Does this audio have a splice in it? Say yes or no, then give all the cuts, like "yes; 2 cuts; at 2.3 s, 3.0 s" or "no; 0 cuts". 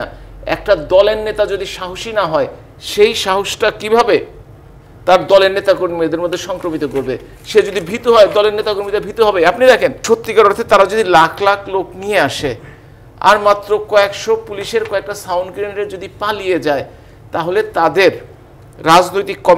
yes; 1 cut; at 10.0 s